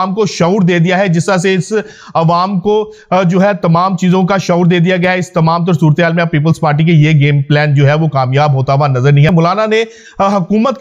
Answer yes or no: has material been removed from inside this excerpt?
yes